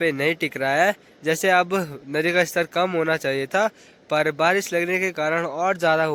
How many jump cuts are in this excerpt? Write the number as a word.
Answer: zero